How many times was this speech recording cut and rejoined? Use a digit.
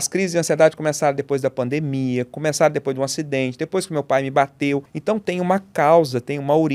1